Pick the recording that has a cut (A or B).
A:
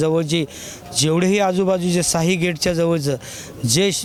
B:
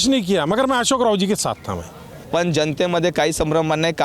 B